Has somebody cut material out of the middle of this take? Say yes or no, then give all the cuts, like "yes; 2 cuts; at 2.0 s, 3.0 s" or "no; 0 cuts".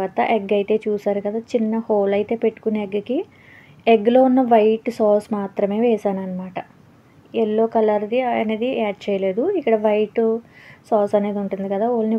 no; 0 cuts